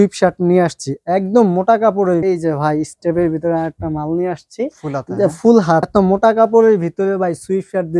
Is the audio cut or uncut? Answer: cut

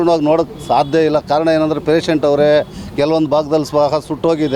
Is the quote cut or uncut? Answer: uncut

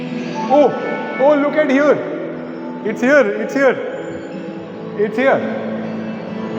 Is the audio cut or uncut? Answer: uncut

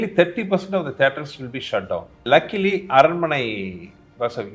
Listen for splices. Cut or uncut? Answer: cut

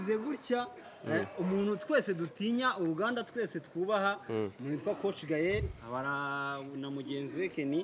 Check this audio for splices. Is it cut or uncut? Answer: uncut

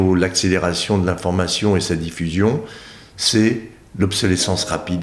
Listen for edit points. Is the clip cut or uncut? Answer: uncut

